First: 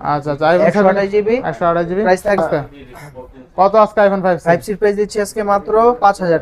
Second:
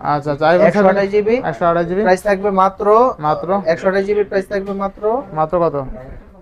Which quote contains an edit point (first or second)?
first